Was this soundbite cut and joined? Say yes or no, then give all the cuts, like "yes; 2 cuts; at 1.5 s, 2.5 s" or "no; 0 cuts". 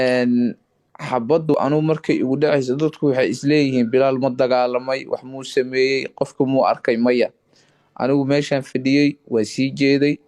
yes; 1 cut; at 1.5 s